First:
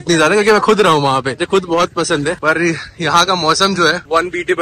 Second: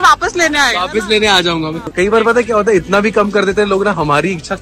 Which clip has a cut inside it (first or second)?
second